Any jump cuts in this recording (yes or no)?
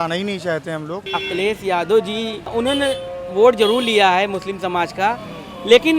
yes